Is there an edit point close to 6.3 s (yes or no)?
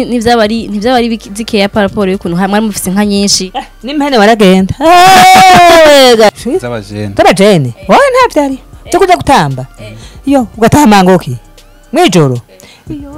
yes